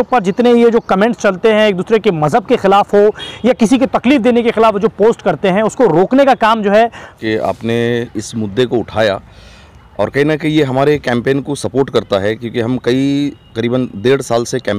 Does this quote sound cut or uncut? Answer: cut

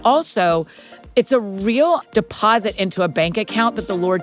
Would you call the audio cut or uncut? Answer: cut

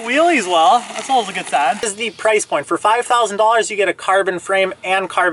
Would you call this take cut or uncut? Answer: cut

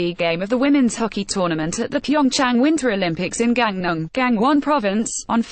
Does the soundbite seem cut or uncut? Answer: uncut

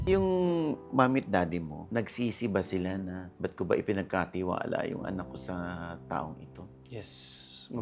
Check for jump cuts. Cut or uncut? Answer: cut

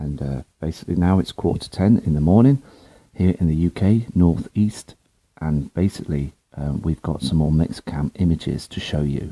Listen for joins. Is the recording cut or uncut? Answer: uncut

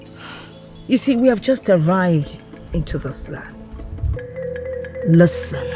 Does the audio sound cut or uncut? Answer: cut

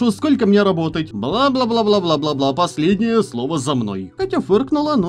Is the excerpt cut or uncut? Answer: cut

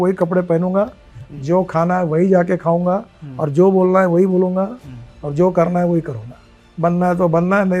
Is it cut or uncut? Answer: uncut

